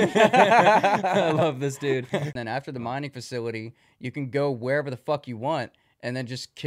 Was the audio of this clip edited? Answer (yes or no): yes